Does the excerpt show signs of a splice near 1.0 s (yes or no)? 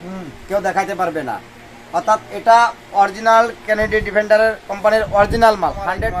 no